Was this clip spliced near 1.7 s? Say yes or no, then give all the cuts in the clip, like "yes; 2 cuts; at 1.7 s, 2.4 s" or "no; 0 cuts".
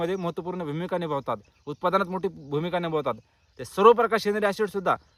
no; 0 cuts